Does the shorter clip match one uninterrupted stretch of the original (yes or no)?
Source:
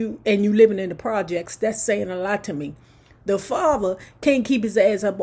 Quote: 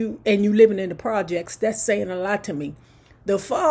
yes